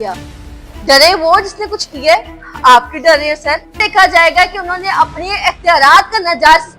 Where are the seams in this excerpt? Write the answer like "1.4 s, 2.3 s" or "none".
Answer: 3.7 s